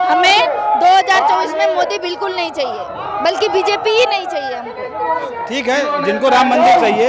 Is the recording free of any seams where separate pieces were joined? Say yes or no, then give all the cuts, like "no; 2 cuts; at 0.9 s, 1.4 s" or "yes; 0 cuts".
no; 1 cut; at 5.5 s